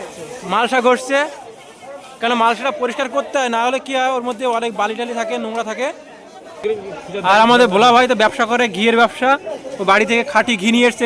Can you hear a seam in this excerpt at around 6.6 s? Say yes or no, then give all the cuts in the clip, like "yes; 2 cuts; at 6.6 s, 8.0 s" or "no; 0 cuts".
yes; 1 cut; at 6.6 s